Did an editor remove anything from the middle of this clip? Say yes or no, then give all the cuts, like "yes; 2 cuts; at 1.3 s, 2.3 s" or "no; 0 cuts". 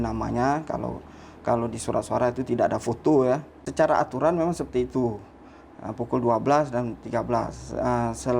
yes; 1 cut; at 3.6 s